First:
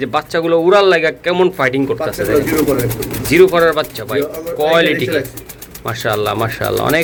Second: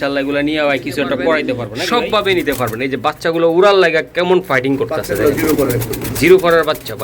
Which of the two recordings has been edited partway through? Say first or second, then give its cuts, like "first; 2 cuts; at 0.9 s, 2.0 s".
second; 1 cut; at 1.7 s